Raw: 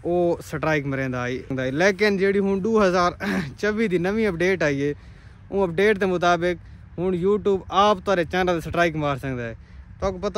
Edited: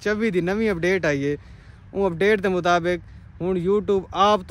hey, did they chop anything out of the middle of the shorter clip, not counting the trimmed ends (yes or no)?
no